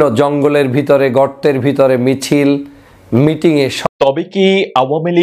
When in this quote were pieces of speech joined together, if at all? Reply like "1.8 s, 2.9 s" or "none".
3.9 s